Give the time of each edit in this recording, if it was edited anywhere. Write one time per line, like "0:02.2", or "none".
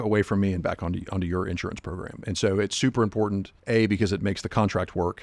0:03.5